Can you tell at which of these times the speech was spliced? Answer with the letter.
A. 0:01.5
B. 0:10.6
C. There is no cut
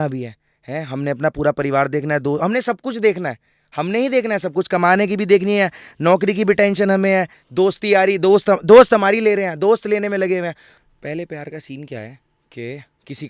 B